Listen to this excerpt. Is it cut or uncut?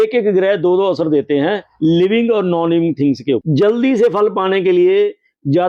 cut